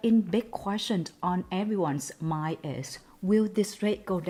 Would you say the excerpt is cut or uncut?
uncut